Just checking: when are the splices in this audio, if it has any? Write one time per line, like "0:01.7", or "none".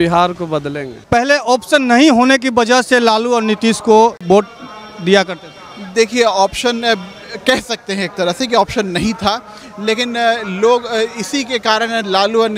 0:01.0
0:04.2